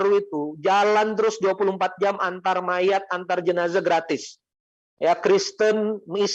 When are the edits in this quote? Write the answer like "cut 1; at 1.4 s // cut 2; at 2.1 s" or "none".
none